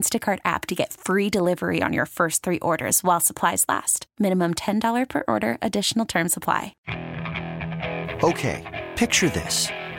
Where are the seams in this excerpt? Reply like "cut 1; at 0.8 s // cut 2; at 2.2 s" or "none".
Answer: cut 1; at 6.8 s